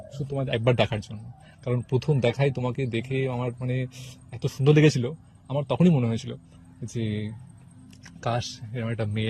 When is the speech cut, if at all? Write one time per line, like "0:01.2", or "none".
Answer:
none